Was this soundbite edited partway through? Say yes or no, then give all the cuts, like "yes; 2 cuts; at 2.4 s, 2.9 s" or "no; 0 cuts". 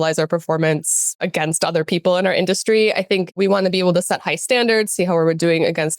yes; 2 cuts; at 1.2 s, 3.4 s